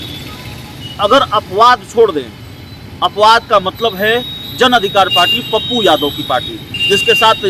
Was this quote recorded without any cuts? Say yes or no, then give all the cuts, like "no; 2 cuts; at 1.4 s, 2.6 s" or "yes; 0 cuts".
yes; 0 cuts